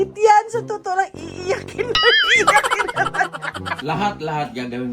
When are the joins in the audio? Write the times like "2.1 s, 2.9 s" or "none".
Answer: 3.8 s

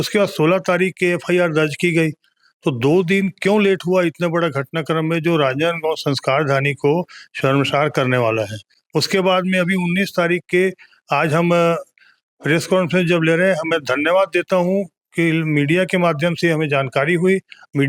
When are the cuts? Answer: none

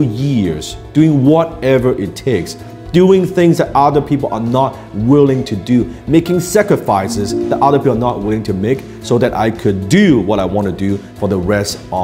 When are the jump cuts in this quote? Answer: none

